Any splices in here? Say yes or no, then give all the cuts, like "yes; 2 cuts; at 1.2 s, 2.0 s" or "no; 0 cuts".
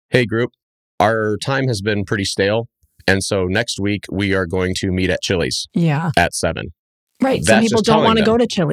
no; 0 cuts